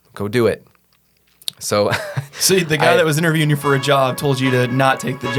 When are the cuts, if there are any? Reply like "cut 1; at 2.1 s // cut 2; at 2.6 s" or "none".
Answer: none